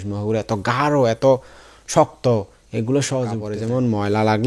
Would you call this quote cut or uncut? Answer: cut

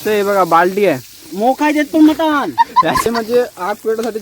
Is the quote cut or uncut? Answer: cut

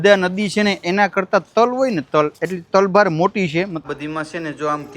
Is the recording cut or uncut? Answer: cut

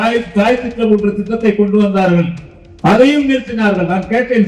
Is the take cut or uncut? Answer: uncut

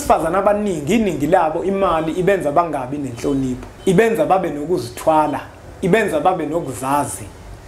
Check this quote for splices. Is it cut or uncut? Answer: cut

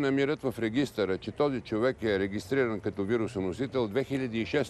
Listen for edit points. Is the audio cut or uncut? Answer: uncut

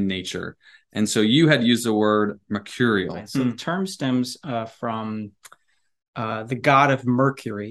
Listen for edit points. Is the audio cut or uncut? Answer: cut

